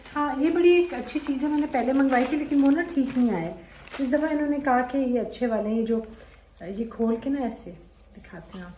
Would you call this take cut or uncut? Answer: uncut